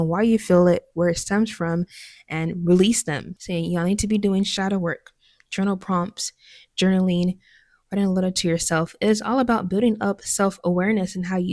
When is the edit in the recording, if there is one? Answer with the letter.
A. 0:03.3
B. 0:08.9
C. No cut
C